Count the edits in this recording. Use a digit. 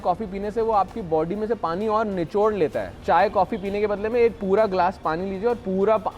1